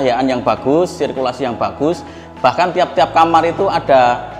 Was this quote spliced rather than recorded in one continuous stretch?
no; 0 cuts

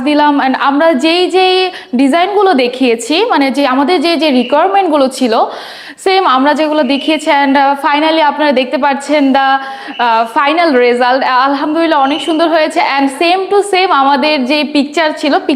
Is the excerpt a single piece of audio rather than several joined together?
yes; 0 cuts

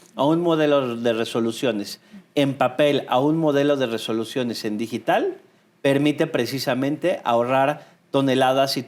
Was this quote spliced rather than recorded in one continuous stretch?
no; 0 cuts

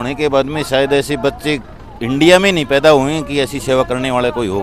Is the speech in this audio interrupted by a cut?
no; 0 cuts

